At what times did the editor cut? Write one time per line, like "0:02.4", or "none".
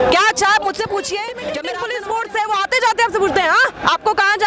0:01.7